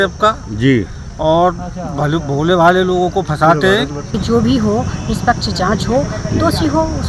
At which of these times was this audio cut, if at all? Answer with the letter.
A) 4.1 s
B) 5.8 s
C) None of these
A